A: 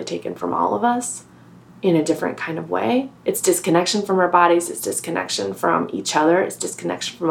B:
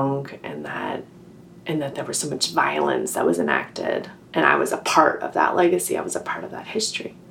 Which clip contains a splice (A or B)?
A